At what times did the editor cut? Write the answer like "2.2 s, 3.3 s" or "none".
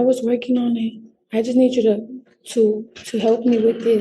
none